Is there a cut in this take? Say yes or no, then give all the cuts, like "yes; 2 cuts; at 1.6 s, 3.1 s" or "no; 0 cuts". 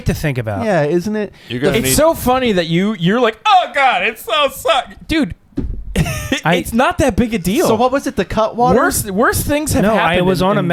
no; 0 cuts